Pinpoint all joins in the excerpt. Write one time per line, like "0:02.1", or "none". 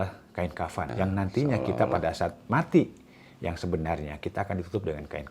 0:00.9